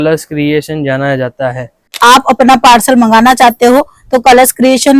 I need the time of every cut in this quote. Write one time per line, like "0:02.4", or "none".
0:01.9

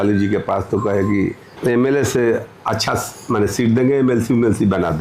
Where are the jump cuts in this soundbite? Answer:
0:01.5

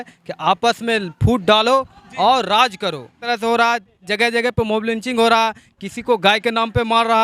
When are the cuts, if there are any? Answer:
0:03.2

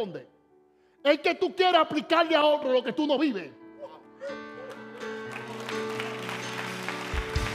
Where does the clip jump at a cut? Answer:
none

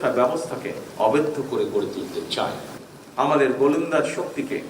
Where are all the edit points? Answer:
0:02.7

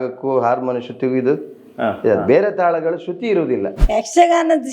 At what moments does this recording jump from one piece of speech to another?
0:03.8

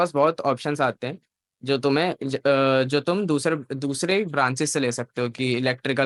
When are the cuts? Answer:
none

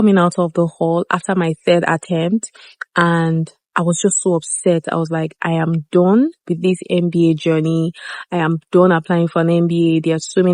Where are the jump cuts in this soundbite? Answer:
none

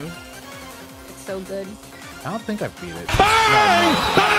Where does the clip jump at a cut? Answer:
0:03.0

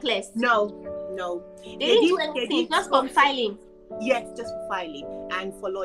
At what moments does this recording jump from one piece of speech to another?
none

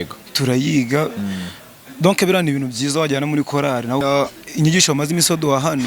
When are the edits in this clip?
0:04.0

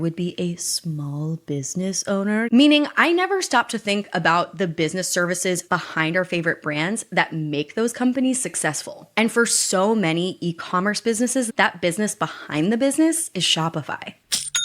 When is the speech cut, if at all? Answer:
0:02.5
0:05.6
0:11.5

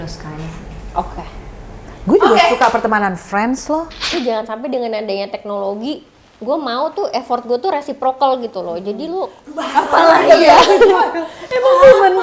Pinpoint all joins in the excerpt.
0:04.1

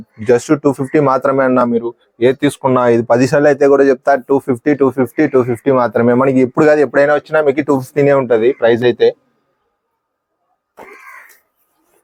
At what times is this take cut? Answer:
none

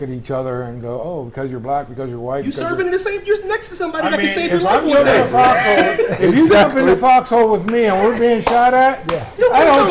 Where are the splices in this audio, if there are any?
none

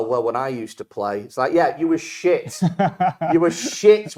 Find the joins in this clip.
none

